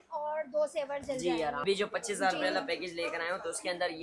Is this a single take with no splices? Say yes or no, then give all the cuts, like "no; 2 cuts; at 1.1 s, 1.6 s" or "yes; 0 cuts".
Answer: no; 1 cut; at 1.6 s